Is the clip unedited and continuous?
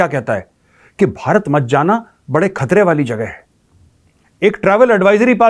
yes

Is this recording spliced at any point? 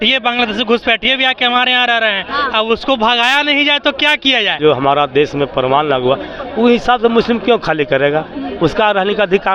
yes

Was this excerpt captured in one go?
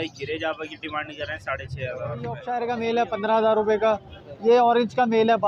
no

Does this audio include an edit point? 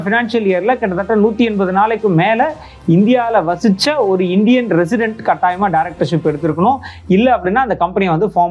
no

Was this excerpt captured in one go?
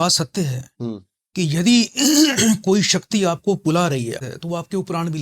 no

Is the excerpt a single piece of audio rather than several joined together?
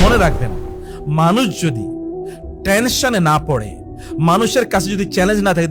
yes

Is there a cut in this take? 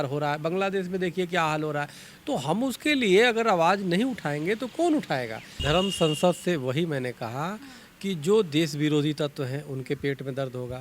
yes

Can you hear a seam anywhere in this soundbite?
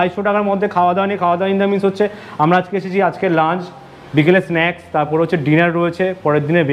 no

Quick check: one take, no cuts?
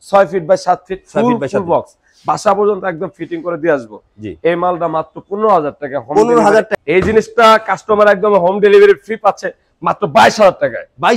no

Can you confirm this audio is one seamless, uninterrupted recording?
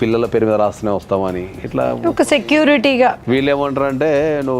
no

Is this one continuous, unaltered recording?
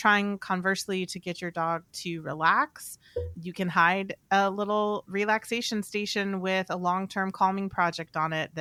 yes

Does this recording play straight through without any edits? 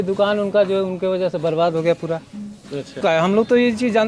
no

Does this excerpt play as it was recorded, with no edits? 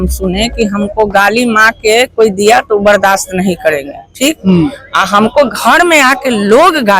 yes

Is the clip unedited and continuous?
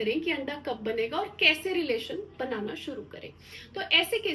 yes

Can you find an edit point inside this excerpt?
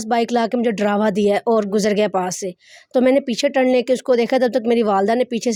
no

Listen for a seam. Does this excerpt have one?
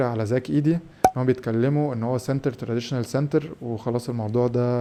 no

